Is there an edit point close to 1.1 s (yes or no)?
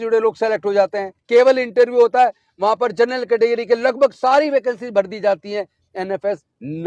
yes